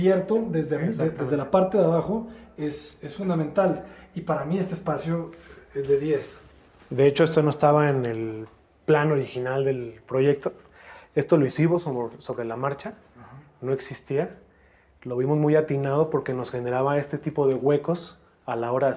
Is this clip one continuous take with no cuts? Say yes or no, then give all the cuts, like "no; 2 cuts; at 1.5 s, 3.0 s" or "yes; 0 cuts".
yes; 0 cuts